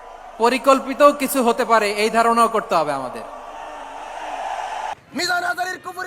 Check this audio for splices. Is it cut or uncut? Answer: cut